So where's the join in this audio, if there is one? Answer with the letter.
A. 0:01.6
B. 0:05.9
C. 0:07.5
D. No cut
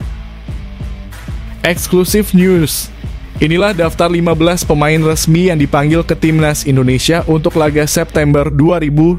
A